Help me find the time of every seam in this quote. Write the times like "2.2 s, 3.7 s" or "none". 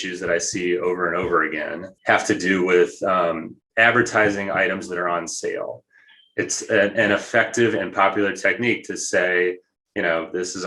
1.8 s, 3.6 s